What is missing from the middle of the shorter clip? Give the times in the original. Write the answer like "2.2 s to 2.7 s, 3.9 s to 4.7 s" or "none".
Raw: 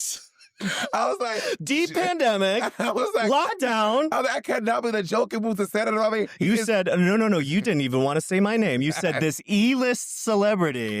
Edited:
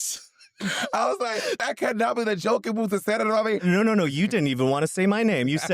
1.6 s to 4.3 s, 6.3 s to 7.0 s